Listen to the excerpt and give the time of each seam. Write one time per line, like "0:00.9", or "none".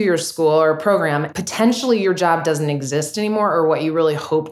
0:01.2